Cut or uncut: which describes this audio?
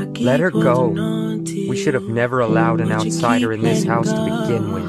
uncut